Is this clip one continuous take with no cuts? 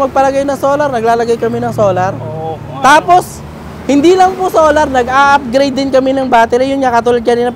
yes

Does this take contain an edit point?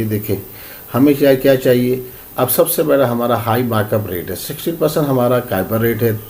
no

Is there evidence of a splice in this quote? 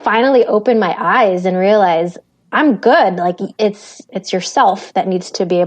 yes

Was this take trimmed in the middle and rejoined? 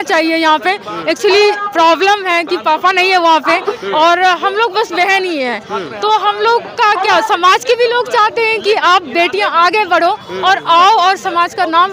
no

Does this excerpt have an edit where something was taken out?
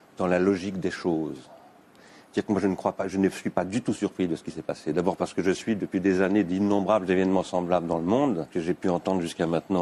no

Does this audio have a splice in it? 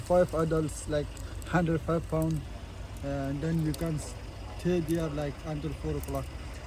no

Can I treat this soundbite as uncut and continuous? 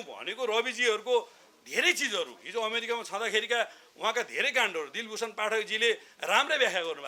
yes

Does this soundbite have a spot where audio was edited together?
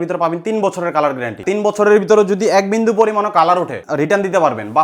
yes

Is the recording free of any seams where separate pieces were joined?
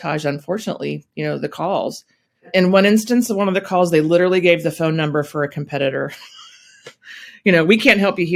yes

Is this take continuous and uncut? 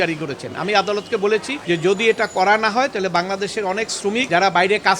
no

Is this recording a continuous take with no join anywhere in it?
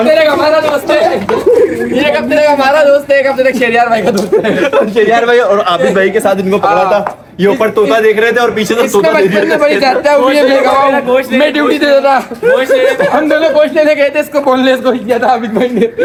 yes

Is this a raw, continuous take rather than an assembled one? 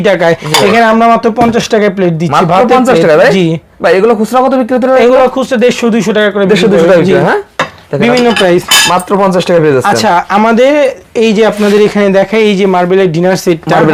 yes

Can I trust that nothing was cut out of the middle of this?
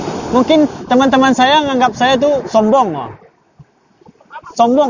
yes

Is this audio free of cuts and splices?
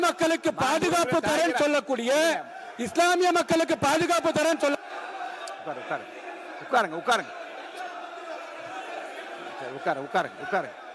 yes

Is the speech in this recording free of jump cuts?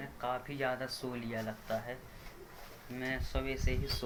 yes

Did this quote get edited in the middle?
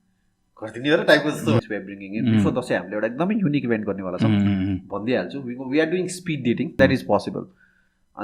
yes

